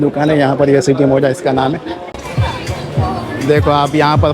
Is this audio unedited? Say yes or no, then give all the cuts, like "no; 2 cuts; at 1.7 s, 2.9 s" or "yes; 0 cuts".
no; 1 cut; at 2.1 s